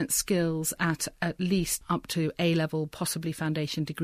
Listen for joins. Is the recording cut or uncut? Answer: uncut